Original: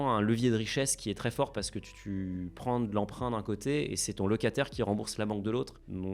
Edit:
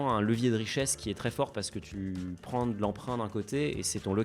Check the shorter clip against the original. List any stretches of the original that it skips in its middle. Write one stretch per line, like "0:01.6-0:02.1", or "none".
0:01.8-0:02.0